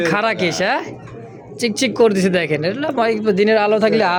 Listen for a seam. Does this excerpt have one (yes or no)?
no